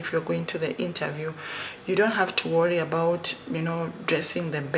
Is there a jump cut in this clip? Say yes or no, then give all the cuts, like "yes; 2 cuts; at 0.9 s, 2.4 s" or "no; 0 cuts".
no; 0 cuts